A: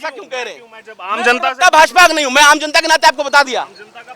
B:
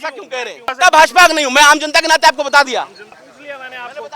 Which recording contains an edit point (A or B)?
B